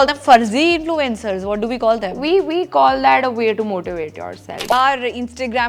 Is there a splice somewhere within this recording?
yes; 1 cut; at 4.7 s

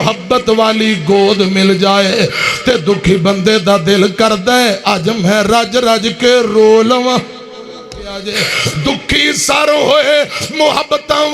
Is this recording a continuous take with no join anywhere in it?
no; 1 cut; at 8.2 s

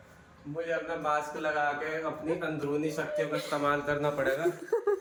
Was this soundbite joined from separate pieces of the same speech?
no; 0 cuts

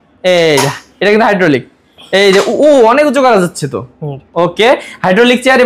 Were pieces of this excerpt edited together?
no; 0 cuts

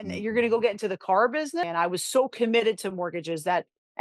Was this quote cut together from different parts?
yes; 1 cut; at 1.7 s

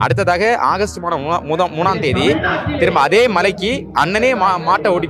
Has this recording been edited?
no; 0 cuts

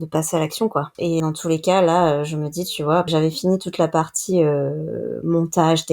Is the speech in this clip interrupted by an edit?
yes; 2 cuts; at 1.2 s, 3.1 s

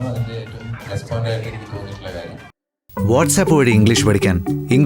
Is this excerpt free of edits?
no; 1 cut; at 2.7 s

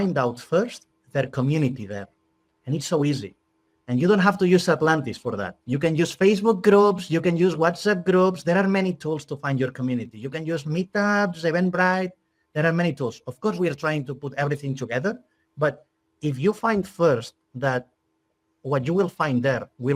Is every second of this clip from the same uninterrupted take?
yes; 0 cuts

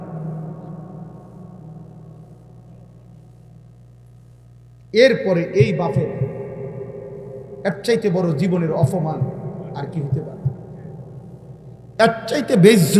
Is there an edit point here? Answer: no; 0 cuts

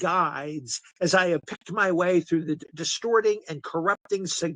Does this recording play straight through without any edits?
yes; 0 cuts

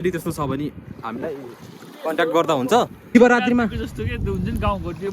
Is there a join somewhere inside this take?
yes; 1 cut; at 3.2 s

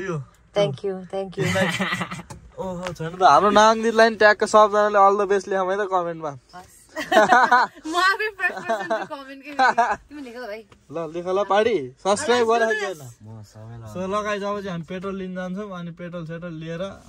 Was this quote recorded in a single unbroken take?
yes; 0 cuts

